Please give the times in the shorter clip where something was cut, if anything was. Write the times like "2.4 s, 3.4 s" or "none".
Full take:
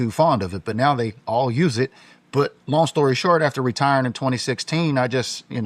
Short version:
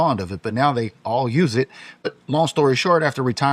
2.1 s